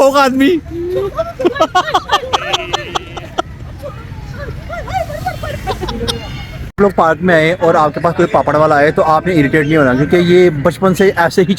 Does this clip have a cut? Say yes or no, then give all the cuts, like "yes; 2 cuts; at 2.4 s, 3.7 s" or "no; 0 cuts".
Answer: yes; 2 cuts; at 2.2 s, 6.8 s